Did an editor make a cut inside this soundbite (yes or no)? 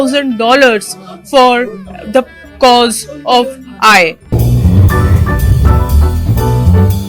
yes